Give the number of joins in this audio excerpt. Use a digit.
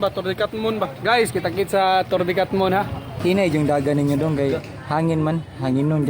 2